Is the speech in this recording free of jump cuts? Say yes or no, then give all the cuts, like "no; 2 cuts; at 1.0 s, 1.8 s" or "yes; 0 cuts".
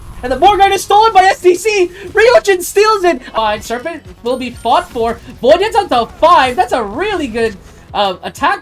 no; 1 cut; at 3.3 s